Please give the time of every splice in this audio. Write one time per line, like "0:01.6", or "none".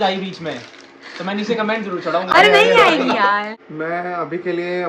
none

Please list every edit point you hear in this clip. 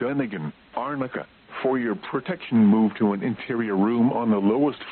0:01.0

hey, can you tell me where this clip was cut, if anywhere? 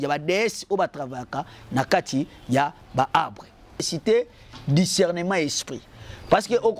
0:03.9

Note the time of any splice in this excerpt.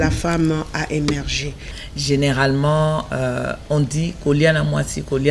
0:01.6

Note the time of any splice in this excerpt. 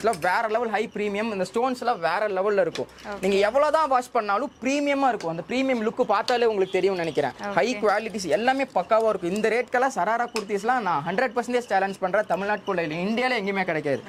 none

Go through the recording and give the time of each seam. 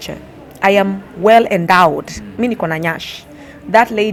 none

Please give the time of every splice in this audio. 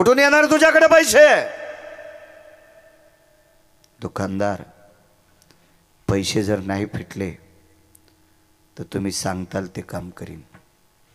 none

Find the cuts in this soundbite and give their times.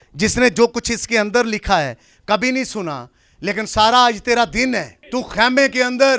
0:05.0

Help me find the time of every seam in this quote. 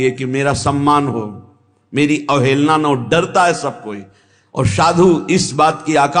none

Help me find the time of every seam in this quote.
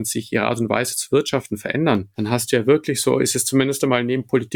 none

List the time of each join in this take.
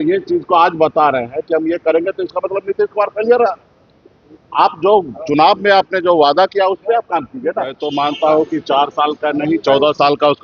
0:07.8

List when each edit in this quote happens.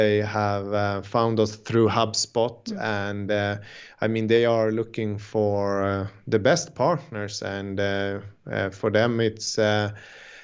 none

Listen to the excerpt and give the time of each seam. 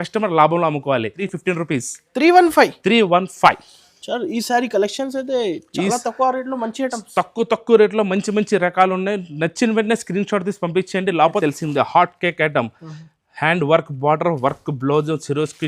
0:01.2
0:11.4

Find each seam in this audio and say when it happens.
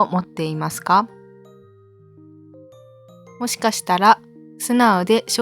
0:01.6
0:03.3

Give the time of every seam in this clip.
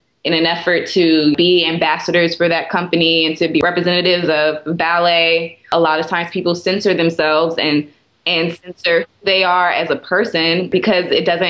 0:01.3
0:03.6

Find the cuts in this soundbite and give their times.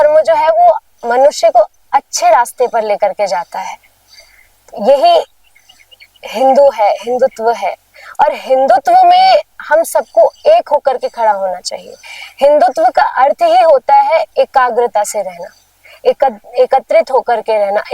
none

